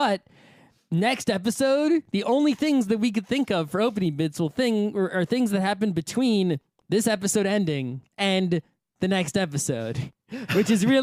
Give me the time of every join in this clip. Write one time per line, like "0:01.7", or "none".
0:09.2